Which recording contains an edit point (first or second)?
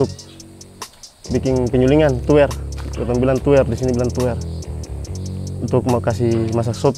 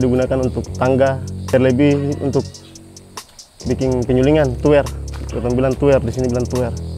second